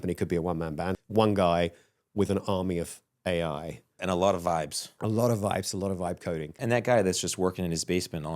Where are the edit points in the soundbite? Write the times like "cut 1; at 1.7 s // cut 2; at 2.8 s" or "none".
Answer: cut 1; at 0.9 s // cut 2; at 4.0 s // cut 3; at 4.8 s // cut 4; at 6.6 s